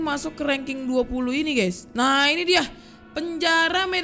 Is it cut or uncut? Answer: uncut